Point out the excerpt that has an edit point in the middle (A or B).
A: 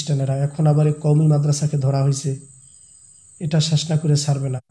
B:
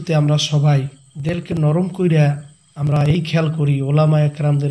B